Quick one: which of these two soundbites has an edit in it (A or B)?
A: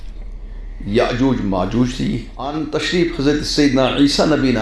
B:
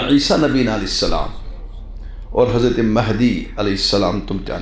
A